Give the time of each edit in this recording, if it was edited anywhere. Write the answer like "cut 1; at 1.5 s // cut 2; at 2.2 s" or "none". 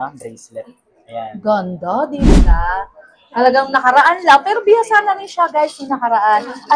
cut 1; at 2.4 s